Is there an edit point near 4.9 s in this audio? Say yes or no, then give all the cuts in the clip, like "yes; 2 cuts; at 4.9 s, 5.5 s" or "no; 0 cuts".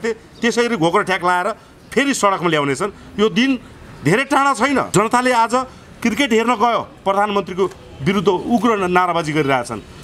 yes; 1 cut; at 4.9 s